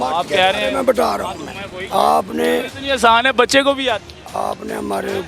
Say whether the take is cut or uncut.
cut